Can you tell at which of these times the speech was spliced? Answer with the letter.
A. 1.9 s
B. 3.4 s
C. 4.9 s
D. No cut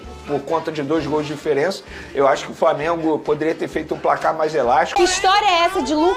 C